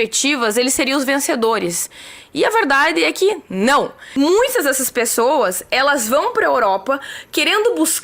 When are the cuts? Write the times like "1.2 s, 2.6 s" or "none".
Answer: 4.0 s